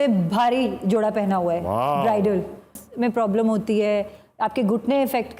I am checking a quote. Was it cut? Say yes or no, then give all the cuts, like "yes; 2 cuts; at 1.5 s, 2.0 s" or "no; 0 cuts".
yes; 1 cut; at 2.8 s